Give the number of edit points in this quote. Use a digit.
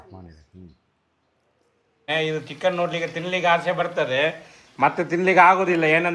1